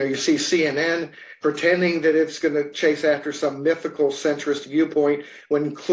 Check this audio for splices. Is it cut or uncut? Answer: uncut